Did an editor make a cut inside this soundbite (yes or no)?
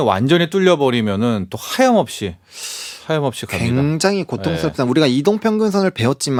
no